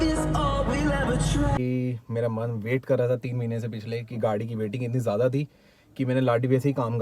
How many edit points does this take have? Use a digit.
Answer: 1